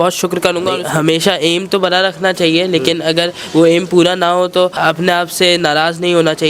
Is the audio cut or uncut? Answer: cut